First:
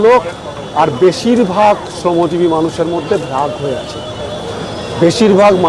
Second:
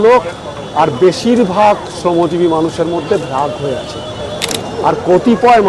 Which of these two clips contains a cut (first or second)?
second